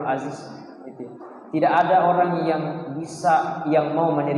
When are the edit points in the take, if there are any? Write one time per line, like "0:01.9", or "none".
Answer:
none